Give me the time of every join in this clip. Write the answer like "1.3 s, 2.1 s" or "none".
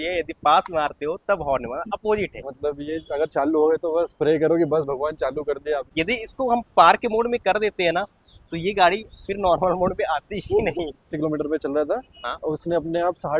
2.5 s, 5.9 s, 11.1 s